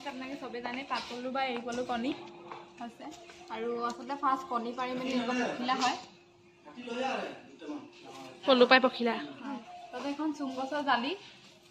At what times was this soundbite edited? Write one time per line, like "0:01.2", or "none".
none